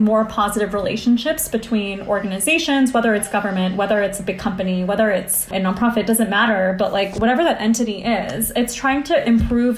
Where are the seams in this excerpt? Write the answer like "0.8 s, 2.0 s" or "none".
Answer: 5.5 s